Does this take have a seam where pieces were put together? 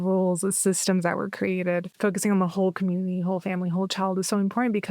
yes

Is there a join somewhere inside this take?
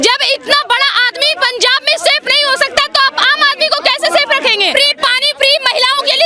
yes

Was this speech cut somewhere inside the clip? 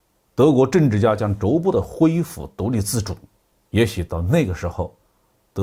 no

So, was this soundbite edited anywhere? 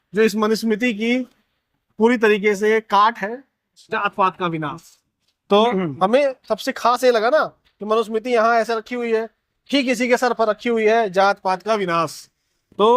yes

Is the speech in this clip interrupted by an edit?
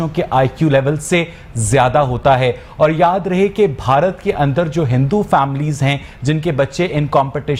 no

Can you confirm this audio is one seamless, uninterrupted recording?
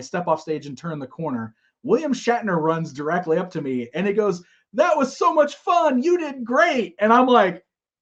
yes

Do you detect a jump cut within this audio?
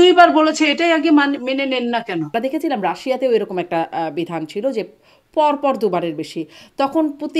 yes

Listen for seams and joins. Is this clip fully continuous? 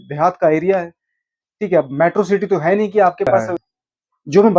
no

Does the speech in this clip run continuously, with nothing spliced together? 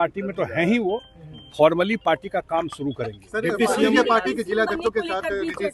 yes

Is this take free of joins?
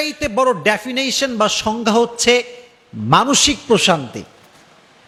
yes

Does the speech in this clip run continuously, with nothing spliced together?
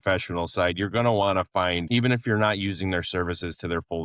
no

